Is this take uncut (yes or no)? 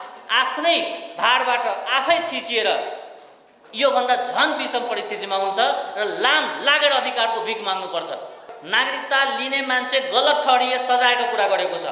no